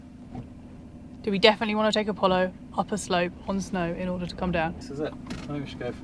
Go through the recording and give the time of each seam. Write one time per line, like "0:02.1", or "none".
0:04.8